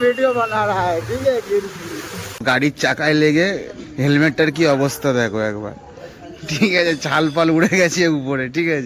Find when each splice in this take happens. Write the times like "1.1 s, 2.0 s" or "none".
2.4 s

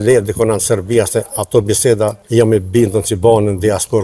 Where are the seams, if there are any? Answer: 2.2 s

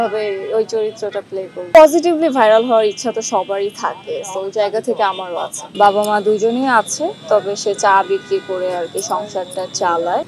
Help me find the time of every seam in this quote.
1.6 s, 5.6 s

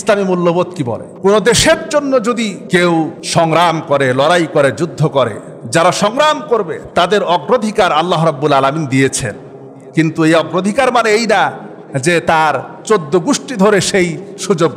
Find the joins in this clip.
1.0 s, 2.6 s, 3.2 s

